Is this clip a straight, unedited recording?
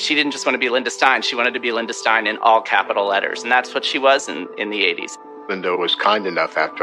yes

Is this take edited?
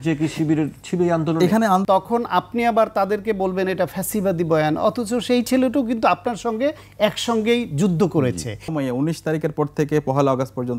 yes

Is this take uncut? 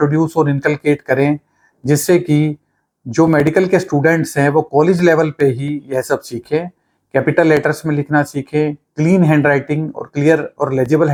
yes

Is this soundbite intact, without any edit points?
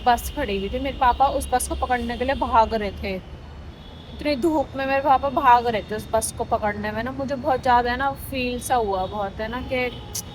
yes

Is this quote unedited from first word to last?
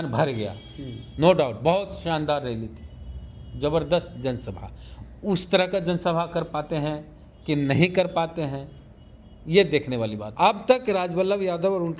no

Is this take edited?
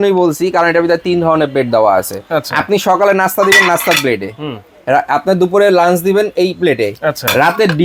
no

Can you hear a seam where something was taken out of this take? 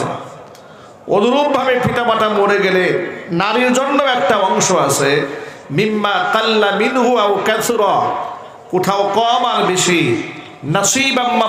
no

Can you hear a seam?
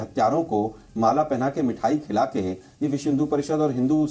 no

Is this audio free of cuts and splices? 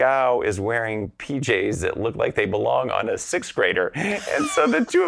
yes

